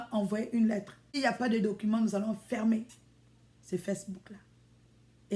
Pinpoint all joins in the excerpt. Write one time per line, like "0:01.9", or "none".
0:01.0